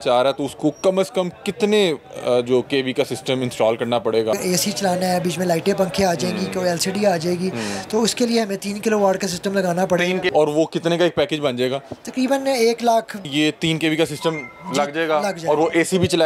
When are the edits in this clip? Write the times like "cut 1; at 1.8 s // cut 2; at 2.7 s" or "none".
cut 1; at 4.3 s // cut 2; at 10.3 s // cut 3; at 13.2 s